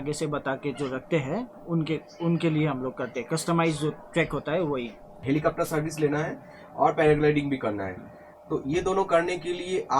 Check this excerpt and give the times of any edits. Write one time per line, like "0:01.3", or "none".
0:05.2